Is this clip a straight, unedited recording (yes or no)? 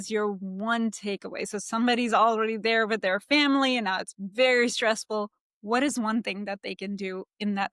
yes